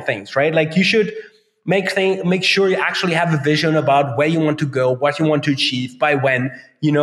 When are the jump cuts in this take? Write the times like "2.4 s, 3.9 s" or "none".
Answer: none